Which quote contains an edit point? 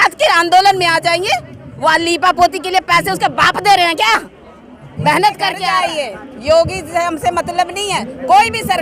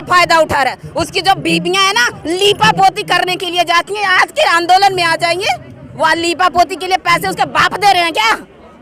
first; 1 cut; at 5.6 s

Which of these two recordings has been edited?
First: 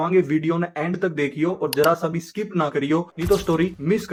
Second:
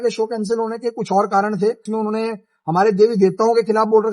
second; 1 cut; at 1.8 s

